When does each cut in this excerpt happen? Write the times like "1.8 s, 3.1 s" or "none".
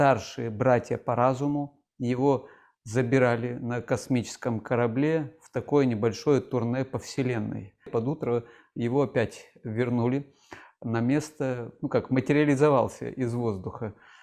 none